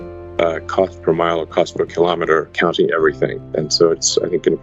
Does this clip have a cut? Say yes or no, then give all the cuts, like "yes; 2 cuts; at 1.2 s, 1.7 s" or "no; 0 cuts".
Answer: yes; 2 cuts; at 2.5 s, 3.5 s